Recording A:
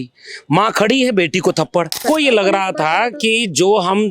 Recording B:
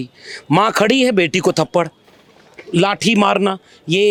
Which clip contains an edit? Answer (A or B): A